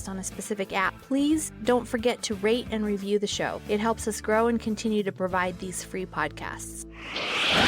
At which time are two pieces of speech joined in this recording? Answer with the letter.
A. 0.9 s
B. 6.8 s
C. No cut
B